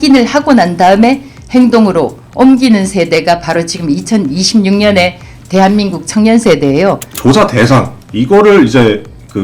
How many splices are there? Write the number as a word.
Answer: one